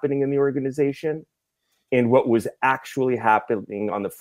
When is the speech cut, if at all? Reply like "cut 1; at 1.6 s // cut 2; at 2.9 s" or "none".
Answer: none